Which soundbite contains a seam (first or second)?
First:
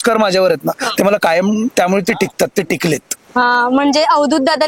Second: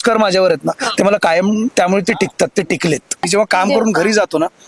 second